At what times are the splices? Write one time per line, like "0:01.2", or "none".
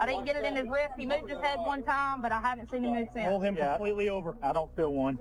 none